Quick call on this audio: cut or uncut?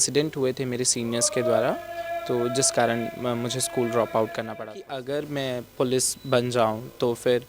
cut